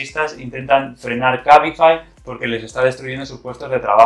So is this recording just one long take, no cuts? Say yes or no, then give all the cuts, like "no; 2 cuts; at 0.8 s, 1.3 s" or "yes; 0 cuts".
yes; 0 cuts